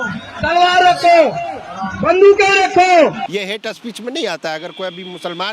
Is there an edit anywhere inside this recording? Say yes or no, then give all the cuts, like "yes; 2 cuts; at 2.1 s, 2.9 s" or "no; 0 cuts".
yes; 1 cut; at 3.3 s